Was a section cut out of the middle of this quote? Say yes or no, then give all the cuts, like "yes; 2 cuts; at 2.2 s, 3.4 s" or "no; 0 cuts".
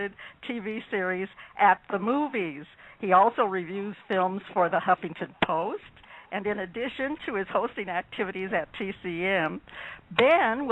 yes; 1 cut; at 4.8 s